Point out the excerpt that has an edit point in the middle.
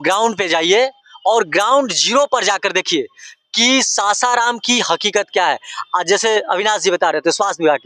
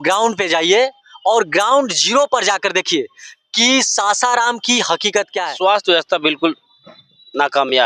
second; 1 cut; at 5.4 s

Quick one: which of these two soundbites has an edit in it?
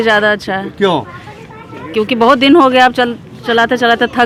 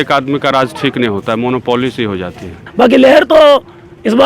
second; 1 cut; at 2.6 s

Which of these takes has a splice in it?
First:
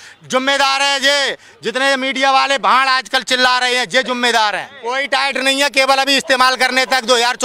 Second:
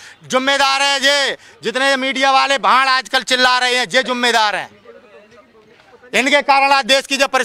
first; 1 cut; at 5.0 s

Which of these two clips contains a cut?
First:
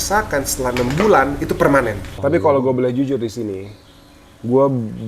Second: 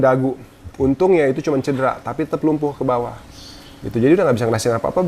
first; 1 cut; at 2.1 s

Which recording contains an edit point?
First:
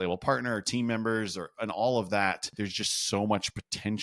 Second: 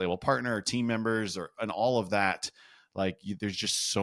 first; 1 cut; at 2.5 s

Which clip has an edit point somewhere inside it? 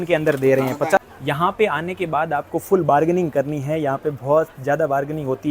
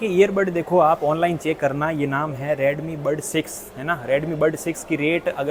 first; 1 cut; at 1.0 s

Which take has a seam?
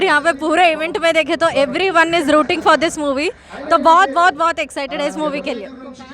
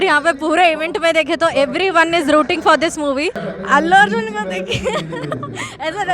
second; 1 cut; at 3.5 s

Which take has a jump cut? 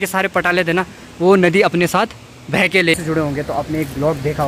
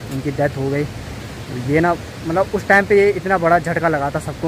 first; 1 cut; at 2.9 s

